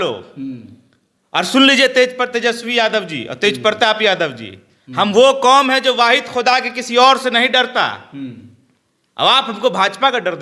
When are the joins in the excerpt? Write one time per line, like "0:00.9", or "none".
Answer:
none